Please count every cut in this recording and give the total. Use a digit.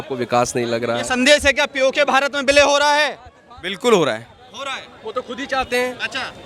0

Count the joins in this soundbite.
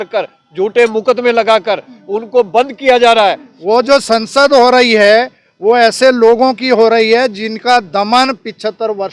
1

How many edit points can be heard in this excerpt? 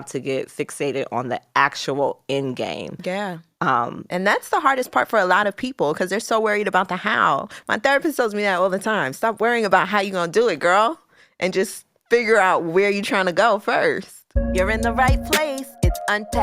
1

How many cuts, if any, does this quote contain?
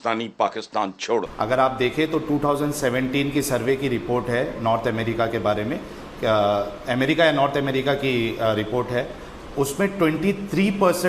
1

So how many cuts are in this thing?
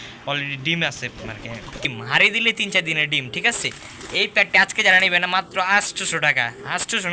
1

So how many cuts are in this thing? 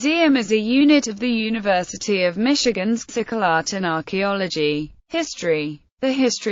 0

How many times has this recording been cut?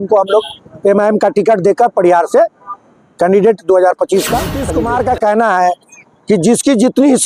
1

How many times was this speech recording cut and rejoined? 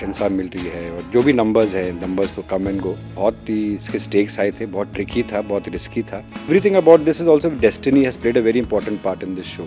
2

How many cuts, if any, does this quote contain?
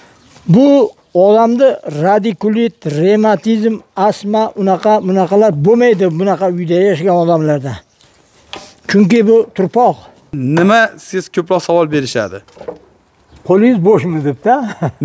1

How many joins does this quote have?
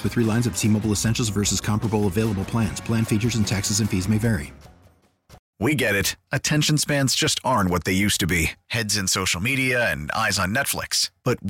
1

